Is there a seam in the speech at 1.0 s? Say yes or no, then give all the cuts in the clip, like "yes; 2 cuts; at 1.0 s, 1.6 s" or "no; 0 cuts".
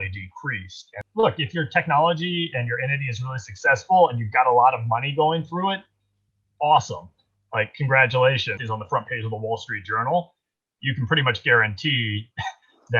yes; 2 cuts; at 1.0 s, 8.6 s